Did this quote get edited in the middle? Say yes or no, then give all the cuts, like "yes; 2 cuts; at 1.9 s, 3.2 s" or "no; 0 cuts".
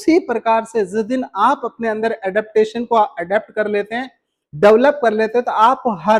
no; 0 cuts